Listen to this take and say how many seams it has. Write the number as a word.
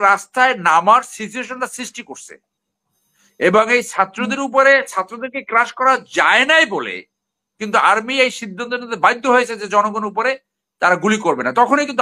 zero